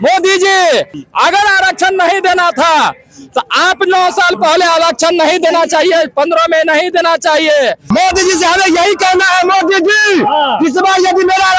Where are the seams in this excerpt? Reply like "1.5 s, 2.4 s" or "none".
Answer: 7.8 s

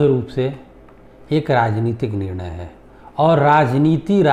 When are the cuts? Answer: none

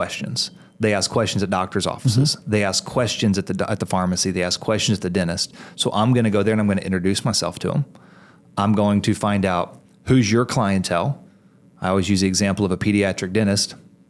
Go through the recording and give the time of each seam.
none

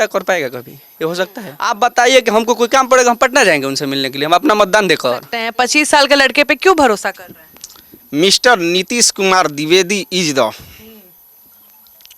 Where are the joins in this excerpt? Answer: 1.5 s, 5.4 s

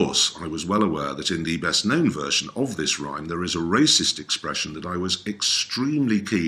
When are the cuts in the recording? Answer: none

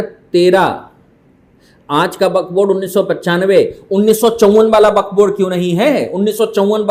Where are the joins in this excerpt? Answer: none

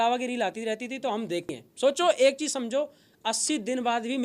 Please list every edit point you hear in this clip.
1.5 s

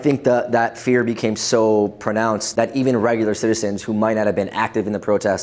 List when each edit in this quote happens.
2.4 s

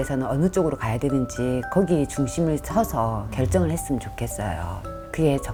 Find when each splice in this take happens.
none

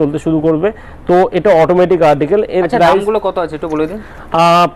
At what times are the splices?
none

